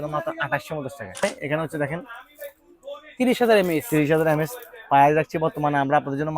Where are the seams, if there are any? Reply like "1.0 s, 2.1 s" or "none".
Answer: 1.2 s